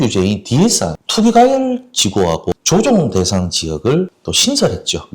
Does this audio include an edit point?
yes; 2 cuts; at 1.0 s, 2.5 s

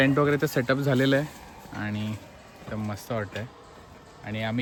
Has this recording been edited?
no; 0 cuts

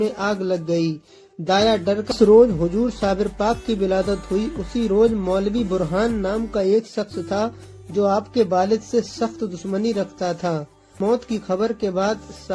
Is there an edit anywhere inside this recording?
yes; 2 cuts; at 2.1 s, 11.0 s

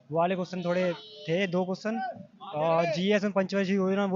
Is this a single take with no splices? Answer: yes; 0 cuts

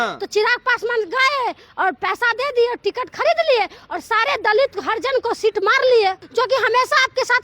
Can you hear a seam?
yes; 1 cut; at 6.2 s

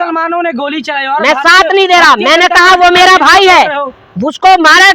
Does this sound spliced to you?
no; 0 cuts

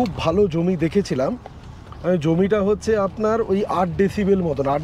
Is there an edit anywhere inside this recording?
no; 0 cuts

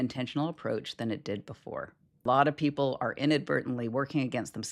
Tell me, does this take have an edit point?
yes; 1 cut; at 2.2 s

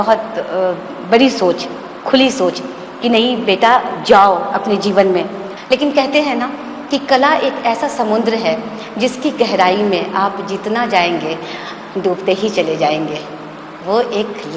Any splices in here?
yes; 1 cut; at 5.4 s

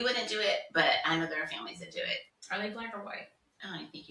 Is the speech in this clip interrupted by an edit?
no; 0 cuts

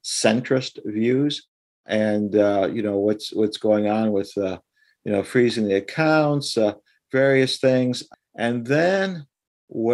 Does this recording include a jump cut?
yes; 2 cuts; at 1.9 s, 8.1 s

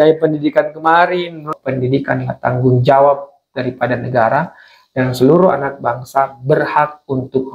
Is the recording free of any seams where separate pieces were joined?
no; 1 cut; at 1.5 s

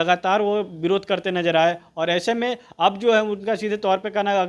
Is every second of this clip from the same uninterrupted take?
yes; 0 cuts

